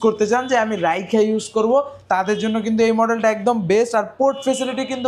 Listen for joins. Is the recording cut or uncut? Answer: uncut